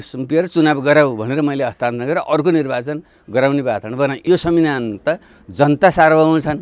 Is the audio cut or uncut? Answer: cut